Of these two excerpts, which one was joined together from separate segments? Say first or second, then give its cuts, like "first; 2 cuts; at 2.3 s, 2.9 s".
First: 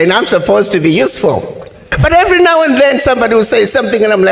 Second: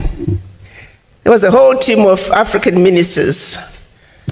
first; 1 cut; at 1.9 s